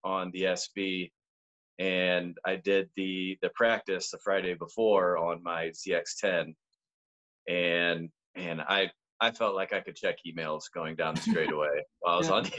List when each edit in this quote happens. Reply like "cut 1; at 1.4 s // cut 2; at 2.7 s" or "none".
none